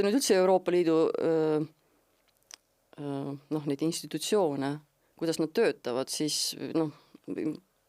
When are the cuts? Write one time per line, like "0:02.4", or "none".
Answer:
none